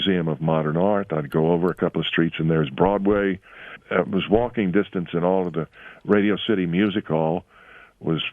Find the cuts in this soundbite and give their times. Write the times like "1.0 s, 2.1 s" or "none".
3.8 s